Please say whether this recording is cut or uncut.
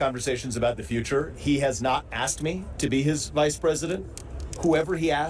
uncut